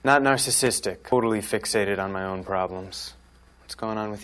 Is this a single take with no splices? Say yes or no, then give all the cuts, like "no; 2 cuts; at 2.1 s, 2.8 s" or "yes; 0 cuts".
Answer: no; 1 cut; at 1.1 s